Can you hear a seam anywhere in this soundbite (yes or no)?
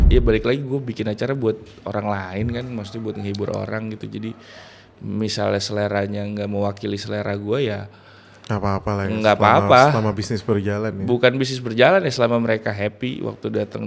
no